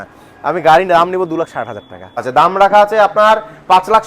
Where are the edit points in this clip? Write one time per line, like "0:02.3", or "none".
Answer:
0:02.2